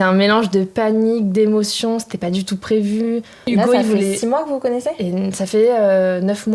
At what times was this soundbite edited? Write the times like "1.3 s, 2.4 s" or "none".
3.4 s